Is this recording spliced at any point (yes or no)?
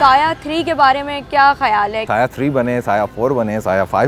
yes